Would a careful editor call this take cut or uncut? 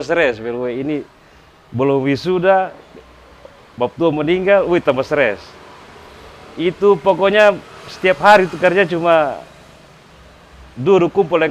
uncut